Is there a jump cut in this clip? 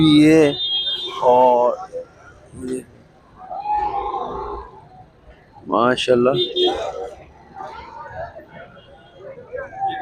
no; 0 cuts

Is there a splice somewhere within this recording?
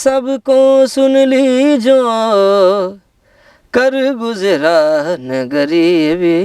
no; 0 cuts

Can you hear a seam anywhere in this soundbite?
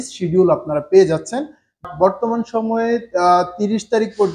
yes; 1 cut; at 1.8 s

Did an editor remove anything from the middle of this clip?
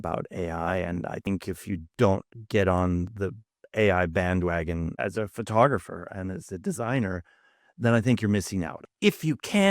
yes; 2 cuts; at 1.3 s, 8.8 s

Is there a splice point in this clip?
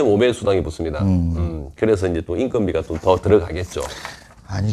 no; 0 cuts

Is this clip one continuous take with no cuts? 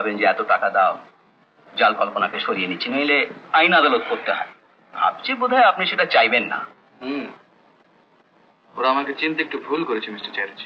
yes; 0 cuts

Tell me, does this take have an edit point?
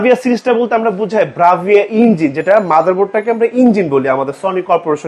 no; 0 cuts

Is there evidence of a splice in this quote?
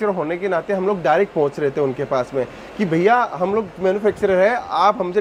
no; 0 cuts

